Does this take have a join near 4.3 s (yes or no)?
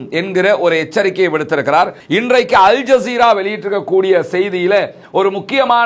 no